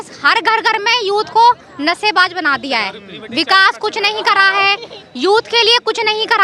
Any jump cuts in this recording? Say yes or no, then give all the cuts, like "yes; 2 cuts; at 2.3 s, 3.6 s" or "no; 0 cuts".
no; 0 cuts